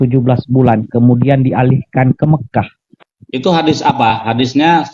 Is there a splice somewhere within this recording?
no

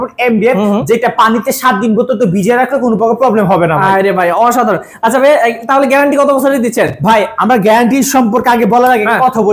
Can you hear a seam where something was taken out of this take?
no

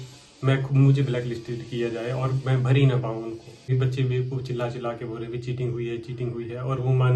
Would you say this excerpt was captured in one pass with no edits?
no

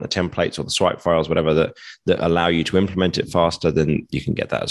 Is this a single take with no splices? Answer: yes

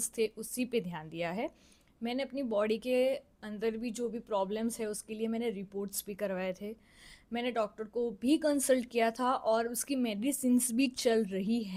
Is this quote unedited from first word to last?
yes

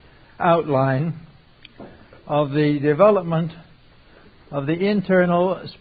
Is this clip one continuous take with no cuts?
yes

